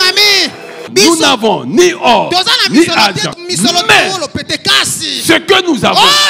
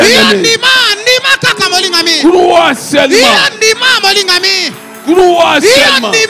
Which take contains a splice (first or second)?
first